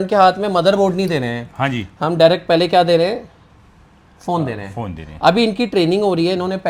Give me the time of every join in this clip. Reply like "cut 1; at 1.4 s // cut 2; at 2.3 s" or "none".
none

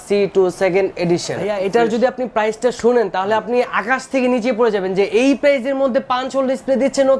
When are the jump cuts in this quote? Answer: cut 1; at 1.6 s

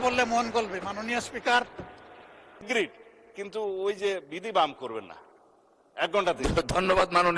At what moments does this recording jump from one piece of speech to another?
cut 1; at 2.7 s

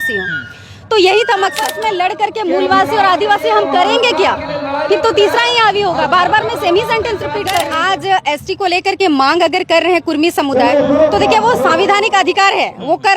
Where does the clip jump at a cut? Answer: cut 1; at 1.7 s // cut 2; at 7.7 s

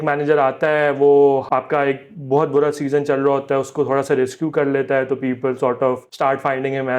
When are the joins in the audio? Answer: cut 1; at 1.4 s // cut 2; at 6.1 s

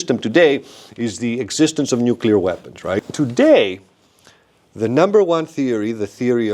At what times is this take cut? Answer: cut 1; at 3.1 s

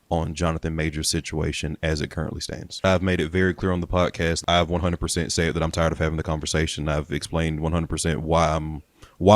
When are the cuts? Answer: cut 1; at 2.8 s // cut 2; at 4.4 s

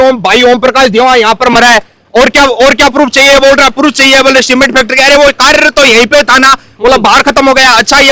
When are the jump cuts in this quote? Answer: none

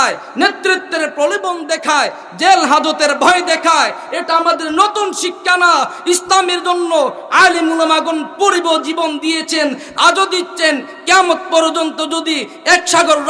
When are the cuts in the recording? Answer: cut 1; at 11.2 s

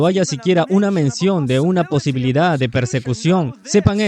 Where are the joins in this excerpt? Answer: none

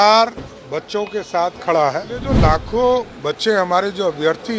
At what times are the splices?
cut 1; at 2.3 s

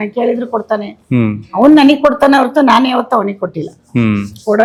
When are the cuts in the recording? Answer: none

